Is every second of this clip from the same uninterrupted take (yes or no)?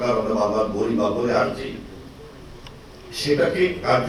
yes